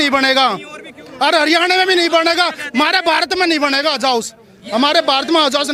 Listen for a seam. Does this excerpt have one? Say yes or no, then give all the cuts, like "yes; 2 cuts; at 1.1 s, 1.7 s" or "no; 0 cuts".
no; 0 cuts